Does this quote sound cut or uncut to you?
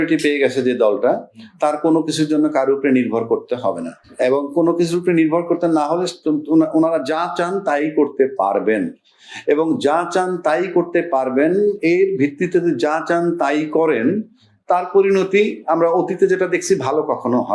uncut